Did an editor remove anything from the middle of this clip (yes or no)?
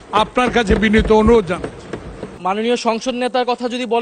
yes